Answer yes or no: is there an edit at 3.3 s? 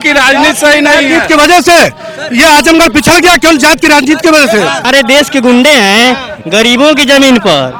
no